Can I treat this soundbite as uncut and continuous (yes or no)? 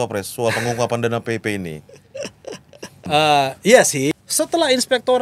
no